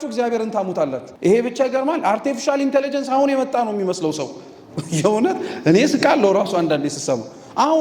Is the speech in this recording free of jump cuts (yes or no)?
no